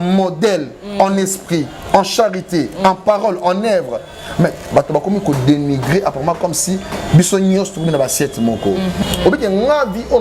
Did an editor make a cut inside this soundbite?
yes; 1 cut; at 9.0 s

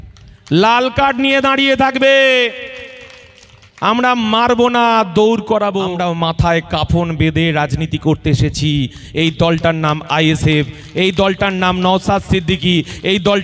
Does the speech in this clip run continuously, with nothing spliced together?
no; 1 cut; at 5.9 s

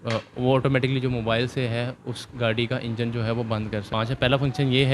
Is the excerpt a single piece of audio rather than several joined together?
no; 1 cut; at 3.9 s

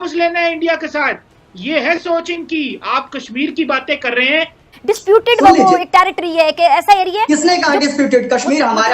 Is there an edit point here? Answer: yes; 1 cut; at 4.6 s

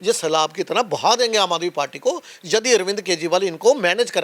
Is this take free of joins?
yes; 0 cuts

